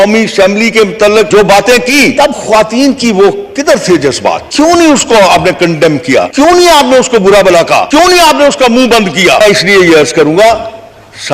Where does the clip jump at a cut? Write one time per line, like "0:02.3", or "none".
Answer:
0:01.3
0:02.1
0:04.4
0:06.3
0:07.9
0:09.4